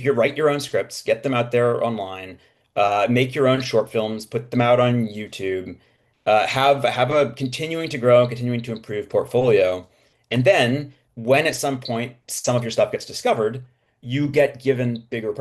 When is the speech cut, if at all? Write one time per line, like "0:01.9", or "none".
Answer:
none